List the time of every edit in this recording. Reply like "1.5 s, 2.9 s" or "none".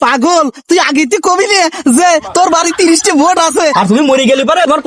3.7 s